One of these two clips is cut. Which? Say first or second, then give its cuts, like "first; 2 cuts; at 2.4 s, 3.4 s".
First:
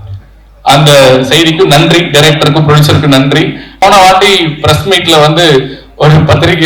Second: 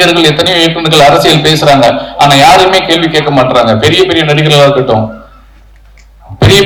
first; 1 cut; at 3.8 s